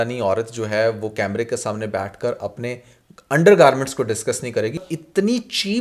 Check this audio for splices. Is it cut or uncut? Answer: cut